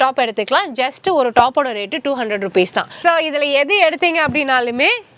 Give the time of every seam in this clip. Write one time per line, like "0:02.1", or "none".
0:03.0